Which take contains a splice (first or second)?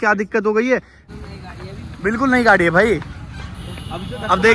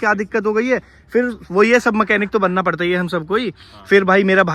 first